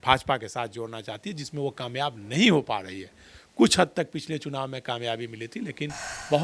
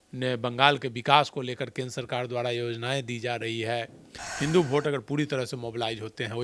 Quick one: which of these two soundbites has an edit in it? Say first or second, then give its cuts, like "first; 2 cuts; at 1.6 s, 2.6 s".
second; 1 cut; at 4.2 s